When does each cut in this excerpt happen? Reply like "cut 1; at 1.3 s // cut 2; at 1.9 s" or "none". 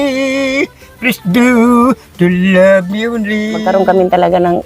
cut 1; at 3.6 s

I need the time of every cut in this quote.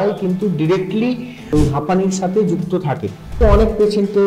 cut 1; at 1.5 s // cut 2; at 3.4 s

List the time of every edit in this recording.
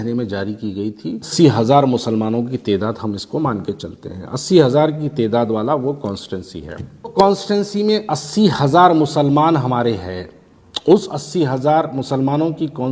cut 1; at 1.2 s // cut 2; at 7.1 s

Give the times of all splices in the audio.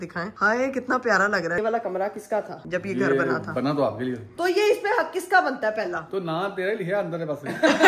cut 1; at 1.6 s // cut 2; at 2.6 s // cut 3; at 4.3 s

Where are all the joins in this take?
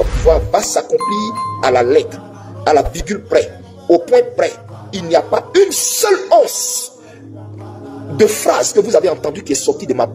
none

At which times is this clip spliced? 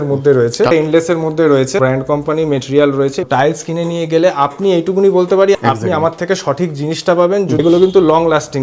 cut 1; at 0.7 s // cut 2; at 1.8 s // cut 3; at 3.3 s // cut 4; at 5.5 s // cut 5; at 7.6 s

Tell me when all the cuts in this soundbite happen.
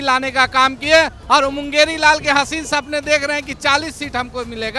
none

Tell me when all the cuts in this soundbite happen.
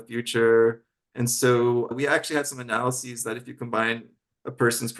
cut 1; at 1.9 s

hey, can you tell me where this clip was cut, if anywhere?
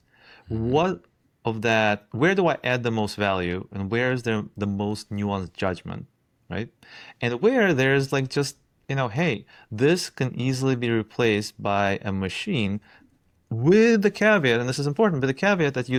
none

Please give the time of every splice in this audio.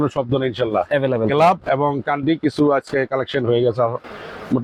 none

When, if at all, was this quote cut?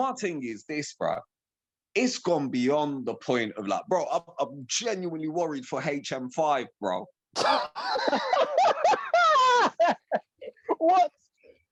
none

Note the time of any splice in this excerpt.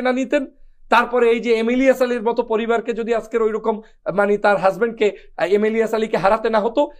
none

